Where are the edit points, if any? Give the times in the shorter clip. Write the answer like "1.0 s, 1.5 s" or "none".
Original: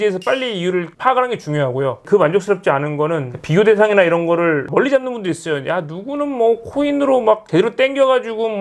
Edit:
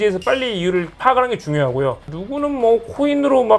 2.0 s